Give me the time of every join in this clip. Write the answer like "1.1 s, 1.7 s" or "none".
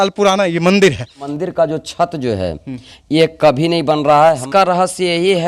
1.3 s, 4.4 s

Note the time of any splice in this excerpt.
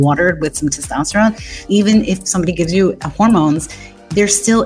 1.5 s, 3.0 s

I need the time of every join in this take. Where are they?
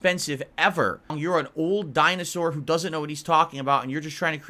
1.2 s

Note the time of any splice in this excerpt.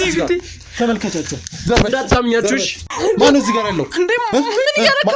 2.8 s

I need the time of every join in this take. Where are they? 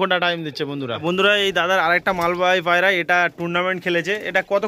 1.0 s

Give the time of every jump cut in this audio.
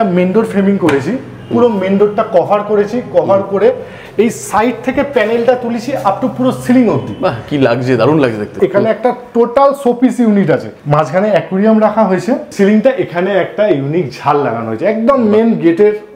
8.5 s, 10.7 s, 12.5 s

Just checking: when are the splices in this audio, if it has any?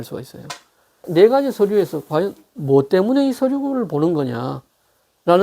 1.1 s

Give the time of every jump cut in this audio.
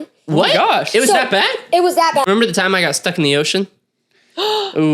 2.2 s

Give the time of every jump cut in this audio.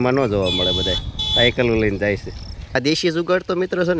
2.8 s

